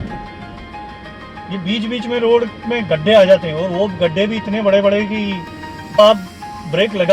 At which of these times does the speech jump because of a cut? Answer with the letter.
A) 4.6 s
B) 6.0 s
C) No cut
B